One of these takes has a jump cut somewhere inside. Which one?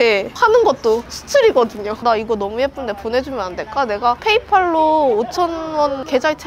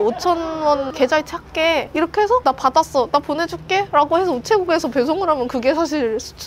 first; 2 cuts; at 1.9 s, 4.2 s

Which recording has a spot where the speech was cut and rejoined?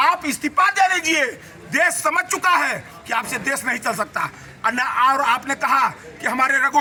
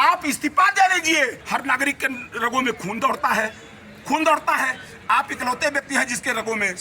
second; 1 cut; at 1.4 s

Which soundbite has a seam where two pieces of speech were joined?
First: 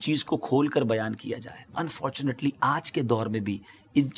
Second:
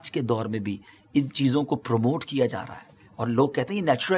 first; 1 cut; at 1.7 s

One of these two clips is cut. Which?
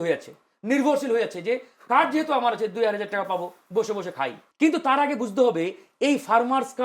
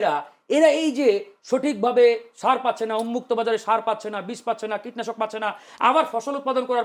first; 1 cut; at 4.4 s

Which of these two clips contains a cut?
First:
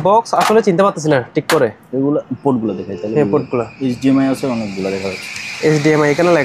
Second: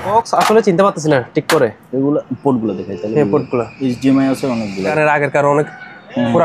second; 1 cut; at 4.9 s

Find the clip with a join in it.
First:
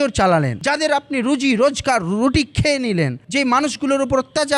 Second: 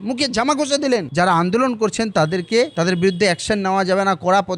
second; 1 cut; at 1.1 s

